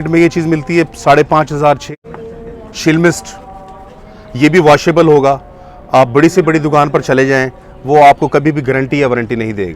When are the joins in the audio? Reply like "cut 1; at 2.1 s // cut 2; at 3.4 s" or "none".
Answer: cut 1; at 1.9 s